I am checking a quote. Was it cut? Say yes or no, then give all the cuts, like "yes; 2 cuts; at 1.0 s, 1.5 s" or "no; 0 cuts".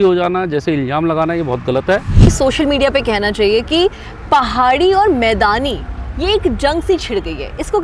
yes; 1 cut; at 2.3 s